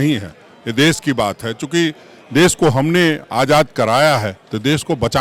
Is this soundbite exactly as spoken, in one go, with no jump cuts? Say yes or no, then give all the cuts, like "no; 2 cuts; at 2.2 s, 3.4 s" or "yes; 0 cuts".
yes; 0 cuts